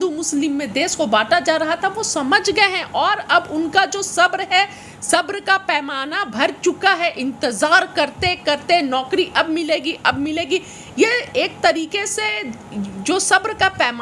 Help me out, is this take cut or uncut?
uncut